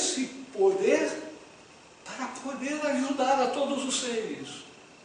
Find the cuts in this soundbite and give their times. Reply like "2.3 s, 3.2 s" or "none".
2.6 s